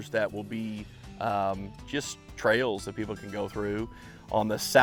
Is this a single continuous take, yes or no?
yes